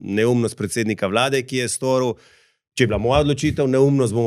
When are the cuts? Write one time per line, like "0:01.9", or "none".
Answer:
none